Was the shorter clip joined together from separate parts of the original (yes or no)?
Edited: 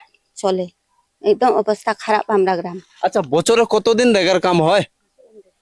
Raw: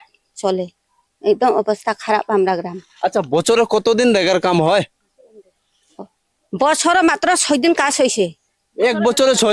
no